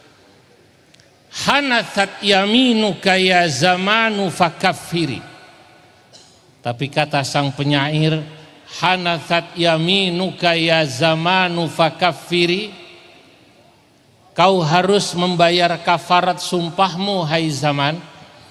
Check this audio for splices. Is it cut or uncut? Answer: uncut